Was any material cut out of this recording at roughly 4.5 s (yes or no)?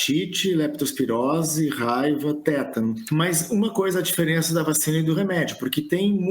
no